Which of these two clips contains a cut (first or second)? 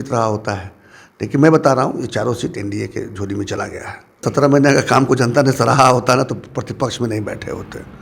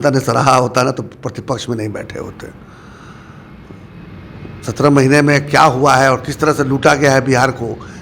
first